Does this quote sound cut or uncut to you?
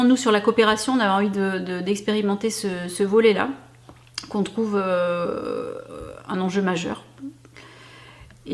uncut